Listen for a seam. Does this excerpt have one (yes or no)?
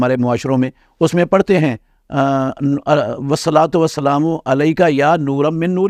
no